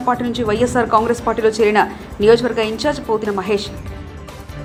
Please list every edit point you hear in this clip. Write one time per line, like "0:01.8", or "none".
none